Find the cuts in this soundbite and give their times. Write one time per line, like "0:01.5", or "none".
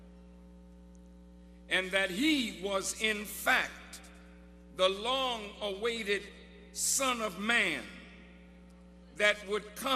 none

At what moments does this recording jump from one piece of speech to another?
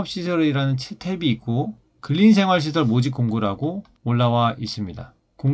none

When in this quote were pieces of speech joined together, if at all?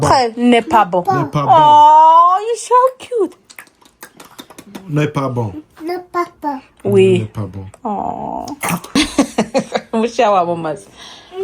0:09.0

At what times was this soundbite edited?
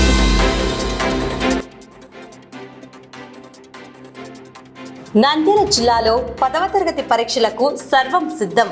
0:01.6
0:04.9

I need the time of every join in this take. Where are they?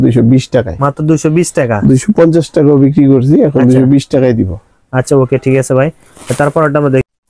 none

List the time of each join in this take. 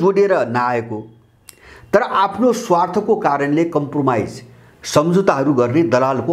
none

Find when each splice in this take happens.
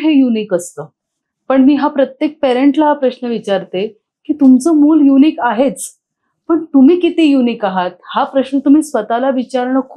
none

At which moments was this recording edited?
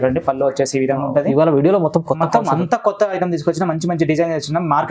none

